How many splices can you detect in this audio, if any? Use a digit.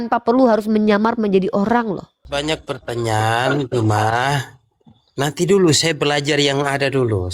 1